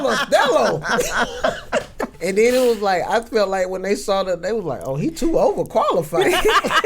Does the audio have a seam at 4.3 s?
no; 1 cut; at 2.2 s

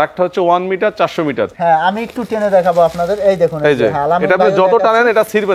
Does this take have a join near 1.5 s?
yes; 1 cut; at 1.5 s

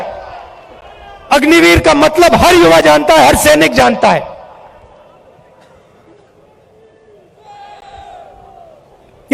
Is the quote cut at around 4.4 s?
no; 0 cuts

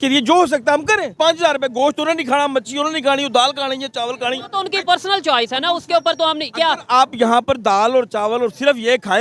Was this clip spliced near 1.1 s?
yes; 1 cut; at 1.1 s

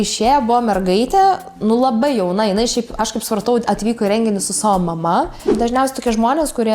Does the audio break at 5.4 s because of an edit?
yes; 1 cut; at 5.4 s

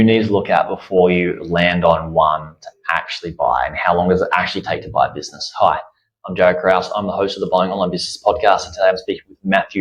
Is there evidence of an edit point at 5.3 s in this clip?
no; 0 cuts

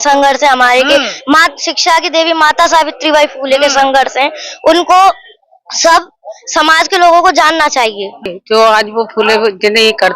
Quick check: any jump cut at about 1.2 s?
no; 1 cut; at 8.4 s

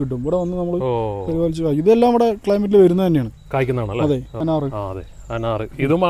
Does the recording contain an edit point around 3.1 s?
no; 1 cut; at 4.3 s

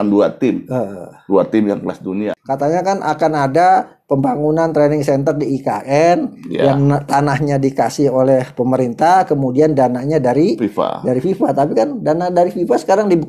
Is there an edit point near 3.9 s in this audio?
no; 1 cut; at 2.4 s

